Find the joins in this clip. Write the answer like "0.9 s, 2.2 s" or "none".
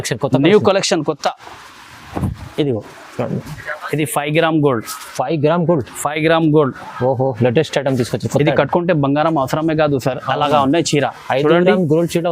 3.5 s